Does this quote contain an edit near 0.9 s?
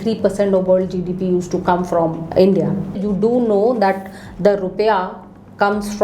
no; 2 cuts; at 2.2 s, 3.0 s

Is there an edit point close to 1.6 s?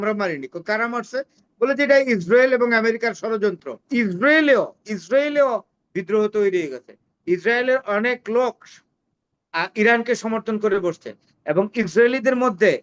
no; 1 cut; at 3.8 s

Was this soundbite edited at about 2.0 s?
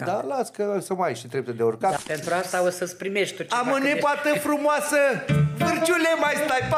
yes; 1 cut; at 2.0 s

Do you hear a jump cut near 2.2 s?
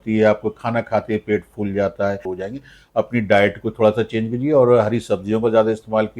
yes; 1 cut; at 2.2 s

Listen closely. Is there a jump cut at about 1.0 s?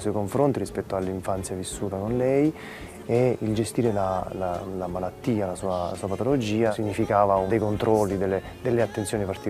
no; 0 cuts

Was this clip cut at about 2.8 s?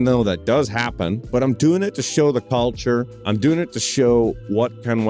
yes; 2 cuts; at 1.2 s, 2.8 s

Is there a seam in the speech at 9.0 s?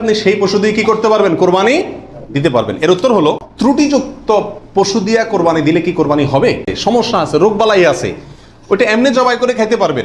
no; 2 cuts; at 3.6 s, 6.7 s

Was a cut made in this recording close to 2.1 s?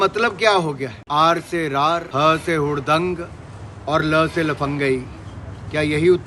yes; 2 cuts; at 0.9 s, 2.1 s

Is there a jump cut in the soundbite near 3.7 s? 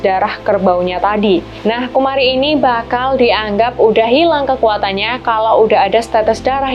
no; 1 cut; at 1.5 s

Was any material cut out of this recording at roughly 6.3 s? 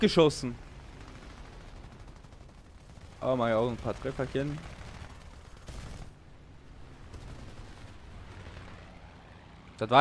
no; 1 cut; at 2.7 s

